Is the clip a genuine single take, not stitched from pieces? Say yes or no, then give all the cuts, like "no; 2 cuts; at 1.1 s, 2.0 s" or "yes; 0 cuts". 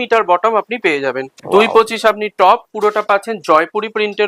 no; 1 cut; at 1.3 s